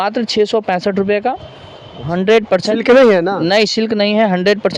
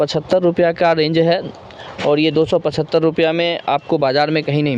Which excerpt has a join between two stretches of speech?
first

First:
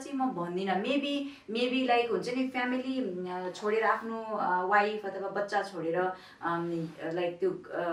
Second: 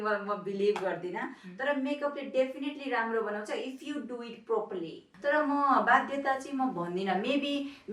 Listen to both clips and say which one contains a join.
second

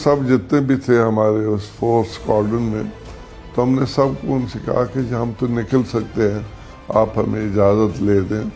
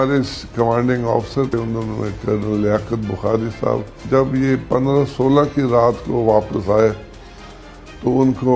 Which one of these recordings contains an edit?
second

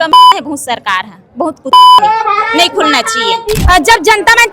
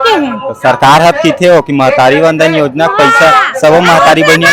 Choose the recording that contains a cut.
first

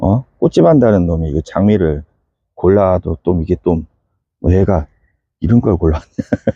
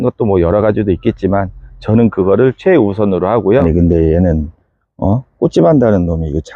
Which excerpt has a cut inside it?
second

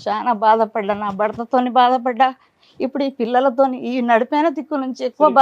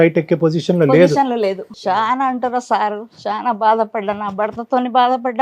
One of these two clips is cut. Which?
second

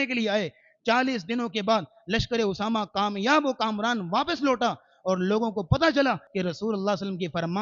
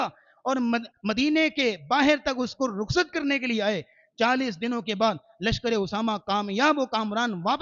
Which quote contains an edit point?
first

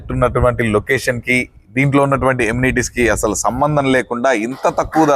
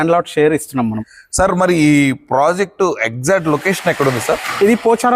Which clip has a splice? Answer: second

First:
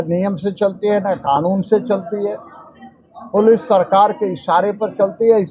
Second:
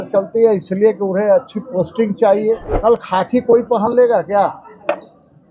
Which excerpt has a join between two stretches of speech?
second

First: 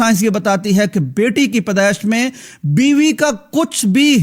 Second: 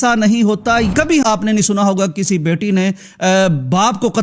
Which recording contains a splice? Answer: second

